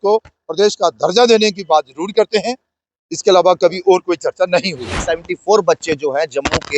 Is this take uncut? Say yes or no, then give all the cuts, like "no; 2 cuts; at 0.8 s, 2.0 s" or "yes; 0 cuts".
no; 1 cut; at 5.0 s